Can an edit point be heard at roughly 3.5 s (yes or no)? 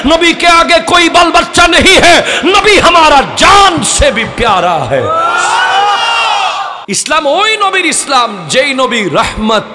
no